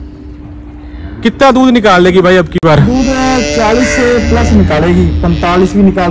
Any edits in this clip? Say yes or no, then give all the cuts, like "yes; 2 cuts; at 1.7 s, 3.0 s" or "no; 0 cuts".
no; 0 cuts